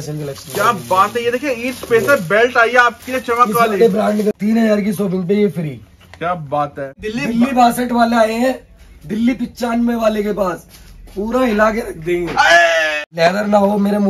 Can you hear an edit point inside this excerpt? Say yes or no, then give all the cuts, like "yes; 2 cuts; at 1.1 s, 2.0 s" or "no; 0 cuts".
yes; 3 cuts; at 4.4 s, 7.0 s, 13.0 s